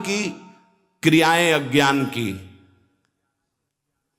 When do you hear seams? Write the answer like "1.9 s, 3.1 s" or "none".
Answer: none